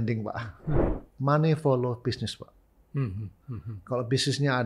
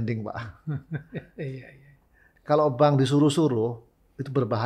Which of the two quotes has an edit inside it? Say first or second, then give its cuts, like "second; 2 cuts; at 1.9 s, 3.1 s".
first; 1 cut; at 0.9 s